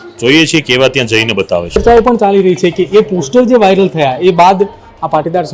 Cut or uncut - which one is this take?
cut